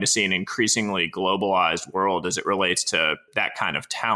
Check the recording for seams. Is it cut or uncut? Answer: cut